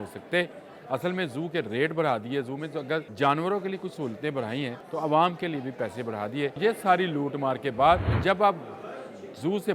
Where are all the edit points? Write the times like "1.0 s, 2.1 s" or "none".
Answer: 3.1 s, 4.8 s, 6.6 s, 8.1 s

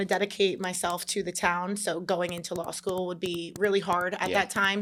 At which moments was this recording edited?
none

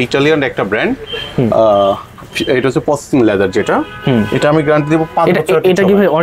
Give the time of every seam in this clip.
none

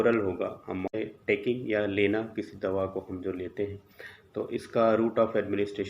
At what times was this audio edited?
0.9 s

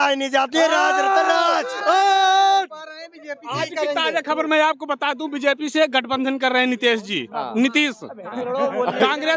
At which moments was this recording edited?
none

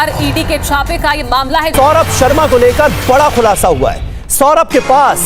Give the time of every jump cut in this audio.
1.7 s

